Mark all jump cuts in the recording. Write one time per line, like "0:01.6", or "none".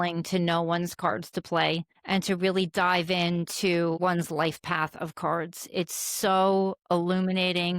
0:01.9
0:04.0